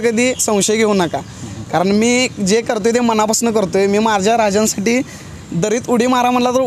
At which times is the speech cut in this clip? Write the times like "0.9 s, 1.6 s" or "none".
none